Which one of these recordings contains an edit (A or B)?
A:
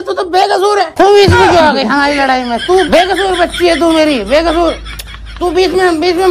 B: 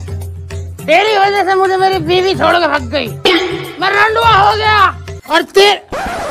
B